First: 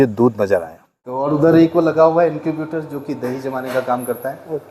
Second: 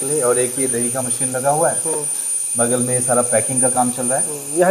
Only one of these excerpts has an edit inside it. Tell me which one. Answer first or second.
first